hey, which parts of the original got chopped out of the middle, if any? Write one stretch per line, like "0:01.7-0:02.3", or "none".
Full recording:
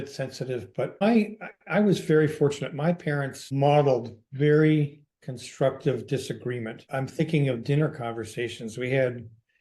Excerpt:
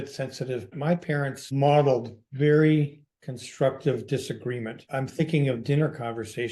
0:01.0-0:03.0